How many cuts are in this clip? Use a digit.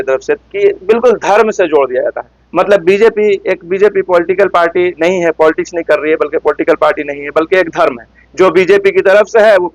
0